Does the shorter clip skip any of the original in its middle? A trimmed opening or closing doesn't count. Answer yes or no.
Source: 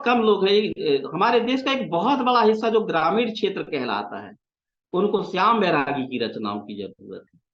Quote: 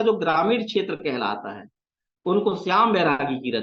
no